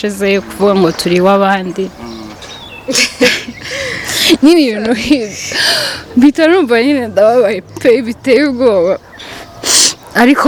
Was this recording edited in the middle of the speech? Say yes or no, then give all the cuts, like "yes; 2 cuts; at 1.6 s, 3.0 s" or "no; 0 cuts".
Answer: no; 0 cuts